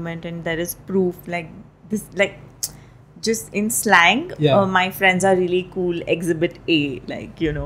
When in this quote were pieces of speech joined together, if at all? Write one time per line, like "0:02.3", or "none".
none